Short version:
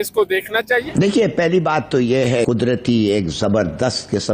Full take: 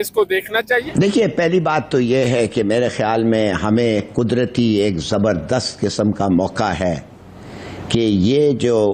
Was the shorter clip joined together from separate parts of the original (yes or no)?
yes